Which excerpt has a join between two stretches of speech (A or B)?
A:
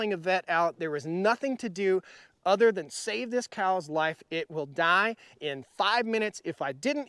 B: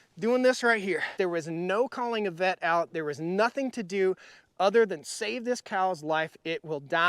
B